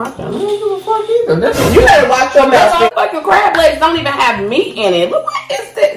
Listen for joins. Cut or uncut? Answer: cut